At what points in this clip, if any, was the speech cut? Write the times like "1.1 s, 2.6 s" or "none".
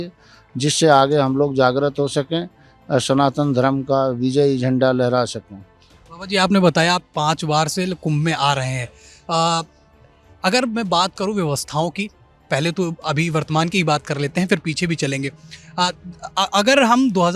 none